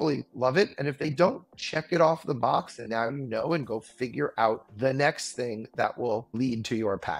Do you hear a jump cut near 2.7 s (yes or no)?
no